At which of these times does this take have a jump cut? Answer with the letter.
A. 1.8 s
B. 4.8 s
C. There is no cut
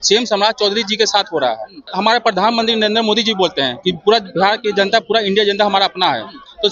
A